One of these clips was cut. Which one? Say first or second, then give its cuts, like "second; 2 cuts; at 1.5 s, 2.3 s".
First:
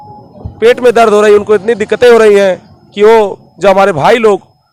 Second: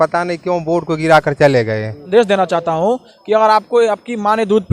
second; 1 cut; at 2.0 s